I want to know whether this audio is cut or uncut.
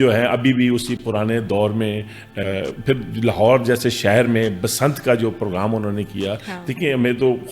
cut